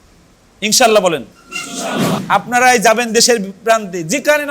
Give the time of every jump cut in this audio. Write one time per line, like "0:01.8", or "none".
0:02.2